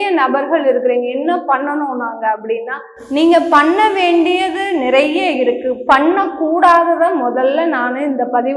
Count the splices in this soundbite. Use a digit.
0